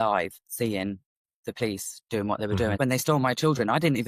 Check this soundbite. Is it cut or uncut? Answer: cut